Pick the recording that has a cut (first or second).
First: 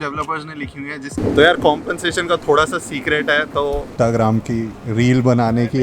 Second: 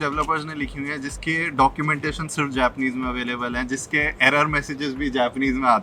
first